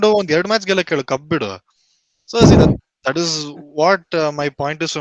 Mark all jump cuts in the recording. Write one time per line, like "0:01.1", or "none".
none